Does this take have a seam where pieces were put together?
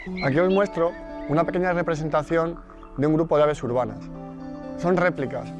no; 0 cuts

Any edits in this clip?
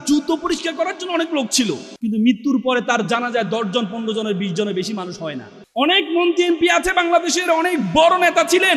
yes; 2 cuts; at 1.9 s, 5.5 s

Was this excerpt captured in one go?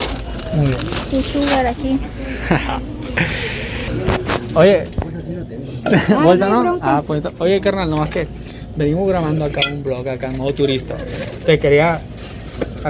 yes; 0 cuts

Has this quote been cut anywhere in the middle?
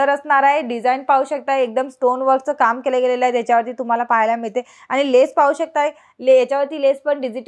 no; 0 cuts

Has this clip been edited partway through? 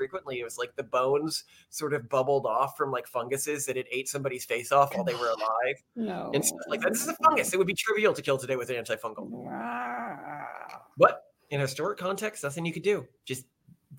no; 0 cuts

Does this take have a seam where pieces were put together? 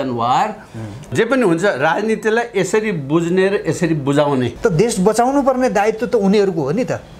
yes; 2 cuts; at 1.1 s, 4.5 s

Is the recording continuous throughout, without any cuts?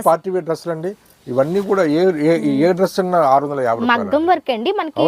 yes; 0 cuts

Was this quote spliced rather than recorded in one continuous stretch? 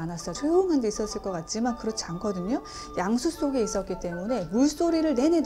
no; 0 cuts

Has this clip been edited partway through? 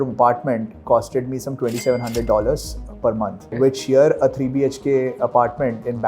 no; 0 cuts

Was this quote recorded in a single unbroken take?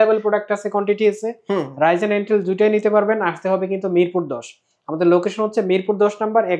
yes; 0 cuts

